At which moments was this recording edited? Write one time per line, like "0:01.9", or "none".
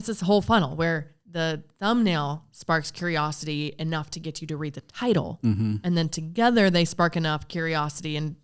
0:01.2